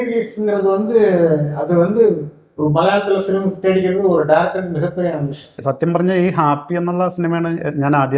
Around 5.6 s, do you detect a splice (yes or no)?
yes